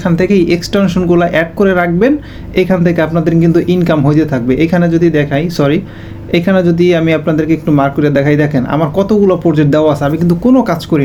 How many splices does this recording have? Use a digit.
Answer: 0